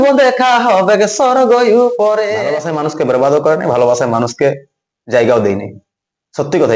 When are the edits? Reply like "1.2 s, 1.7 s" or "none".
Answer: 2.6 s